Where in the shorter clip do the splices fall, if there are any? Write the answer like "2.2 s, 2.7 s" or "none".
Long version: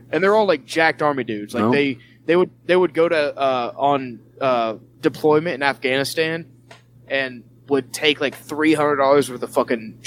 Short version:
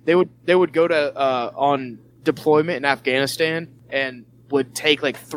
2.1 s, 3.8 s